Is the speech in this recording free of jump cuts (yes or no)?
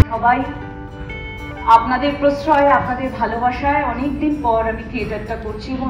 yes